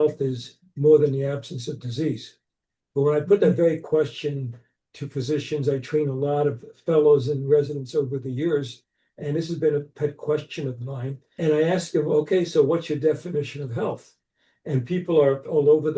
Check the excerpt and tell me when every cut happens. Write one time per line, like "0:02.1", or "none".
0:11.3

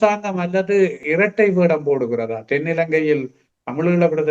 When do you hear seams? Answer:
0:01.0

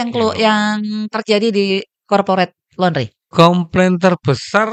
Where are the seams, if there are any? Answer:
0:03.2

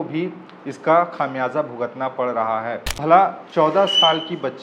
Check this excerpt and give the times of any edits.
0:03.0

